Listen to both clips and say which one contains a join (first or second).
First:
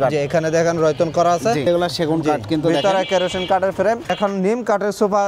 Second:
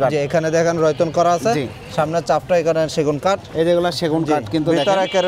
first